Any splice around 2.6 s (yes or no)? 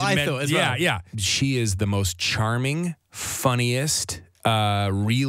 no